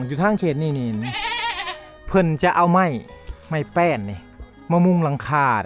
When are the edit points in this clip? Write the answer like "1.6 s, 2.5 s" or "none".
none